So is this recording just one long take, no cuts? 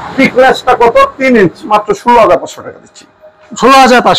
no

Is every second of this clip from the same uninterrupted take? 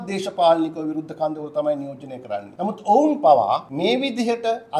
no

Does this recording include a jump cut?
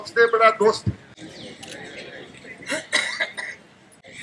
no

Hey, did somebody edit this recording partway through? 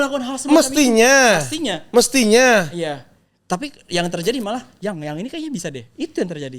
no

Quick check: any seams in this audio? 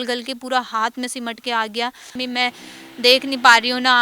yes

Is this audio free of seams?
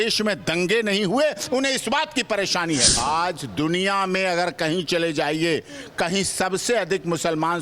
no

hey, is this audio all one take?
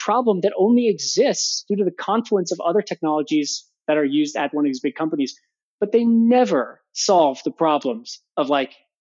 yes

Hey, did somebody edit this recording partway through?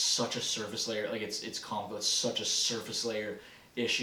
no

